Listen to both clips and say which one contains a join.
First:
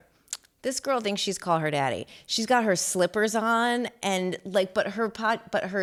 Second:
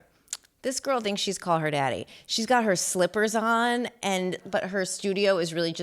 second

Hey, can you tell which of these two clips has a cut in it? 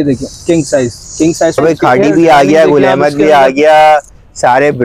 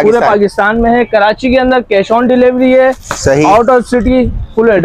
first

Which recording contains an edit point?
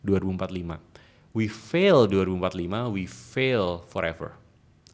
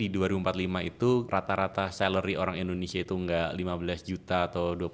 second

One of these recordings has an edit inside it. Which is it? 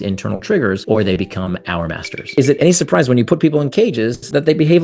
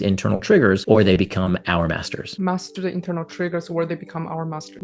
first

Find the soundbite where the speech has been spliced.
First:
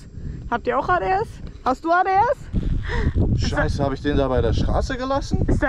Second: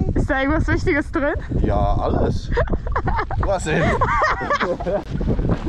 first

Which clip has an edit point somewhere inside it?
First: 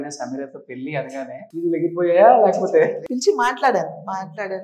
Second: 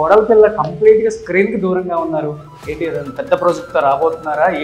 first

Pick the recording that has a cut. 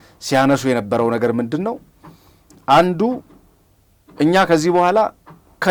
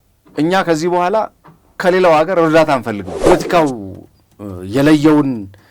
second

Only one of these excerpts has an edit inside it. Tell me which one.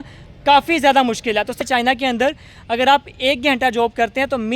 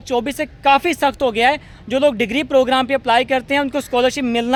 first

